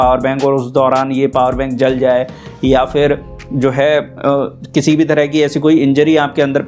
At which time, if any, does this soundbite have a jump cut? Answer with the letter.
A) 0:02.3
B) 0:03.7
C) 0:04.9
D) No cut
D